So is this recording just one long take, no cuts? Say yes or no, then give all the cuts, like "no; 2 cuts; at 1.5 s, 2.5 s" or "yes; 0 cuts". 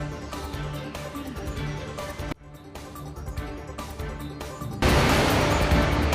no; 1 cut; at 4.8 s